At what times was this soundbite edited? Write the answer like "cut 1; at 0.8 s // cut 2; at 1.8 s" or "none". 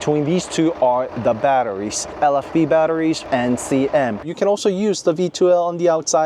cut 1; at 2.1 s // cut 2; at 3.2 s // cut 3; at 4.2 s